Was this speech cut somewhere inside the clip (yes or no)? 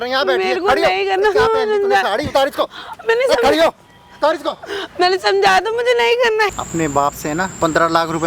yes